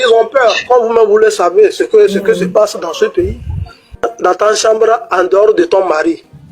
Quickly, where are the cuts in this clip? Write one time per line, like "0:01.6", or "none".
0:04.1

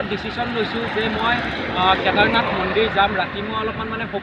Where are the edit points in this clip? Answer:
none

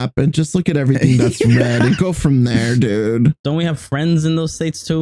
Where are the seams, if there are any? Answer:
0:03.4

